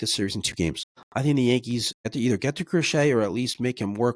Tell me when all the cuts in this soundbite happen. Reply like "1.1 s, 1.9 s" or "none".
0.9 s, 2.1 s

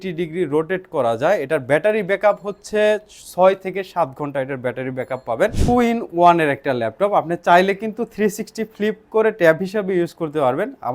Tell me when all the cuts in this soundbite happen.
5.6 s

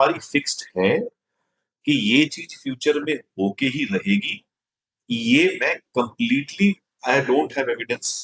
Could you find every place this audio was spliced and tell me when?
none

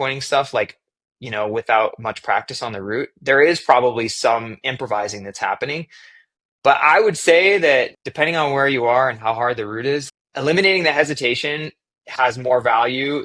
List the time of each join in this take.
7.9 s, 10.0 s

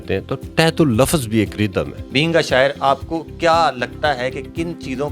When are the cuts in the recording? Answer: 2.0 s

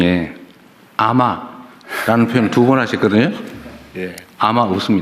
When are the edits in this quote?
none

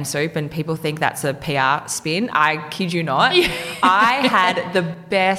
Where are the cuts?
none

